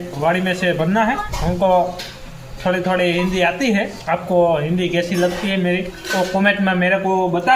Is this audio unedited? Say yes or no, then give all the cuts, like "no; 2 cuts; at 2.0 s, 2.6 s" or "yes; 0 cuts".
no; 3 cuts; at 1.3 s, 4.0 s, 6.0 s